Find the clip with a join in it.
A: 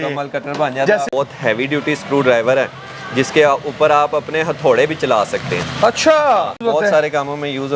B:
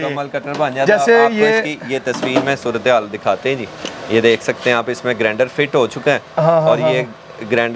A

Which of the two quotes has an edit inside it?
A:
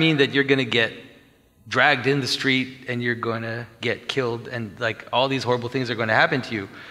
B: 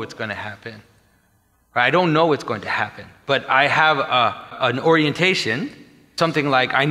B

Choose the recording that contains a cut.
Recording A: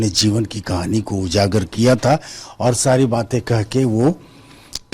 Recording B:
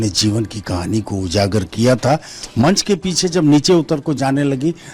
B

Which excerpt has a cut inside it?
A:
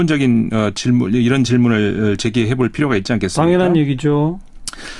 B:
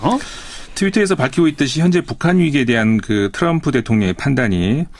A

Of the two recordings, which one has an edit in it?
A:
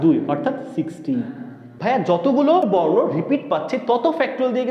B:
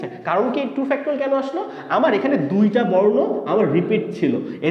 A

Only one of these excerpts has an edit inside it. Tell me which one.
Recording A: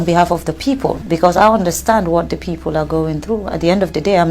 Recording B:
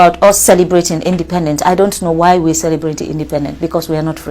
A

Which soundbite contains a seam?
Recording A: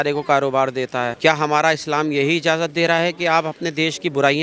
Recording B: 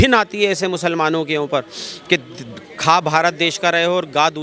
A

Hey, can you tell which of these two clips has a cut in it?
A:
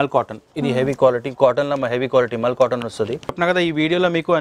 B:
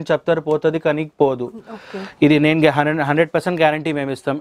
A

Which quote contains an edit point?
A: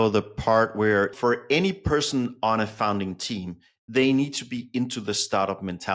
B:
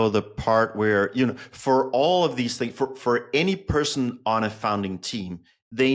A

